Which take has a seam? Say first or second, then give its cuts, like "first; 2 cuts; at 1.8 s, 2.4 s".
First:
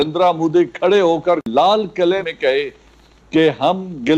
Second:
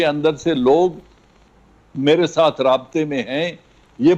first; 2 cuts; at 1.5 s, 2.3 s